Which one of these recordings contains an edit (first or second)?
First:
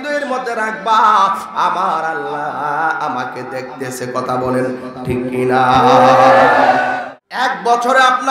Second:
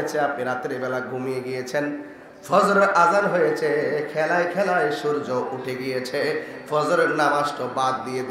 first